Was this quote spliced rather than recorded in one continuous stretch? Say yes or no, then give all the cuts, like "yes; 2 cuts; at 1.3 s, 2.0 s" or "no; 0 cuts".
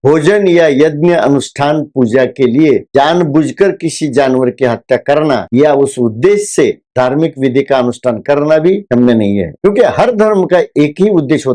no; 0 cuts